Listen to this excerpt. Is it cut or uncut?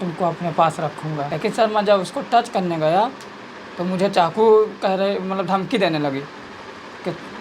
cut